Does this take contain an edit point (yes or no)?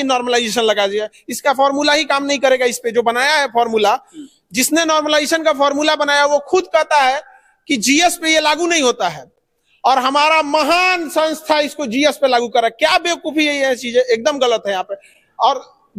no